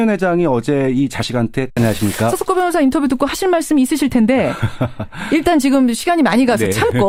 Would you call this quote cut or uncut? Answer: uncut